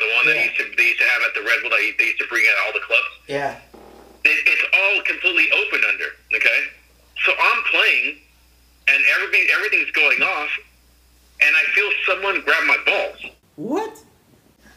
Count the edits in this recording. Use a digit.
0